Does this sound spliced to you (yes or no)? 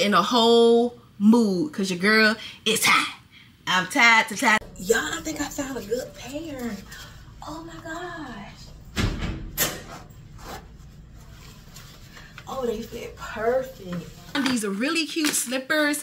yes